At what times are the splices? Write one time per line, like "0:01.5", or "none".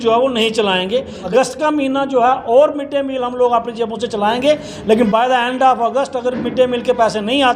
0:01.2